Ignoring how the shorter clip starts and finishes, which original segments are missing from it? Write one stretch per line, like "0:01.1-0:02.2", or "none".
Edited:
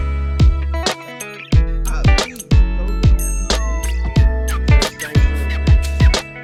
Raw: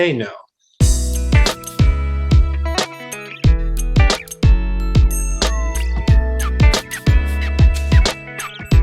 none